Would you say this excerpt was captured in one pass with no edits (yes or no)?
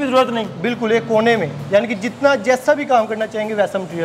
no